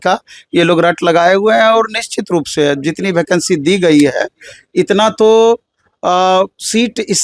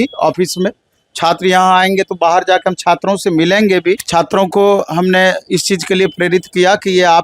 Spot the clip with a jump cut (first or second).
second